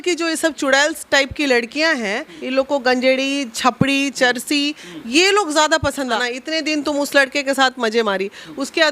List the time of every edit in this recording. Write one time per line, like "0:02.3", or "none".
0:02.3
0:06.2